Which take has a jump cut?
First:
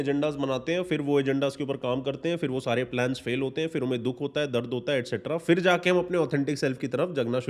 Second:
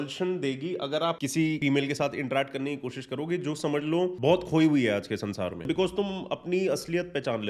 second; 3 cuts; at 1.4 s, 4.2 s, 5.7 s

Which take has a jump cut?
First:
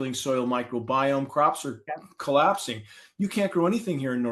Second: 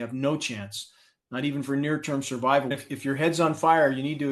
second; 1 cut; at 2.7 s

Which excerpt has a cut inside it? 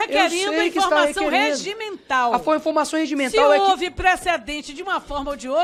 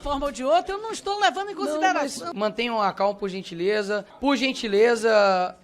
second; 2 cuts; at 2.3 s, 4.1 s

